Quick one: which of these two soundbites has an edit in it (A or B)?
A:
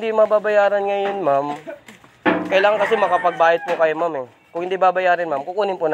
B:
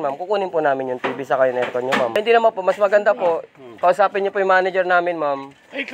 B